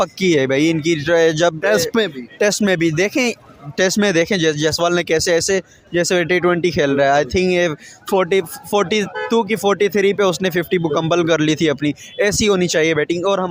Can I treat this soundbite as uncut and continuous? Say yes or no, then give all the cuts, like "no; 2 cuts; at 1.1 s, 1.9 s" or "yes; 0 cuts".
yes; 0 cuts